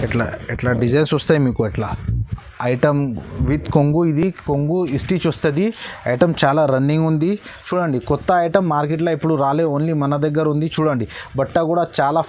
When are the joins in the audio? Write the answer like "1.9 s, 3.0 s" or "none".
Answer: none